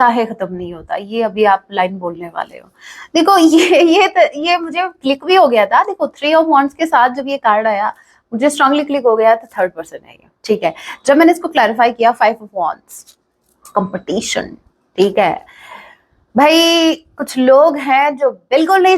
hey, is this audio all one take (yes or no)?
yes